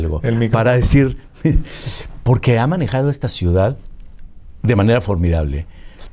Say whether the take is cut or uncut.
uncut